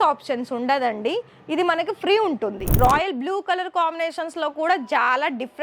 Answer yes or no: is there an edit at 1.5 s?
no